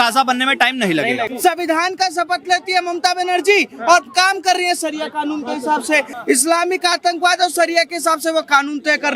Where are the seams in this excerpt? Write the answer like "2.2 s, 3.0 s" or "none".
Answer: 1.3 s, 6.1 s